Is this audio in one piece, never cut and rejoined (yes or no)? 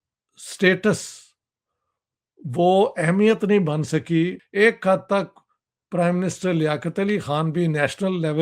no